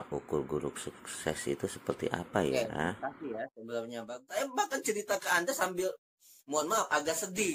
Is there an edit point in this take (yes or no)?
yes